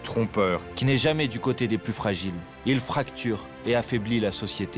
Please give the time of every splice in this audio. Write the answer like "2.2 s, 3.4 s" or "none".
2.5 s, 3.5 s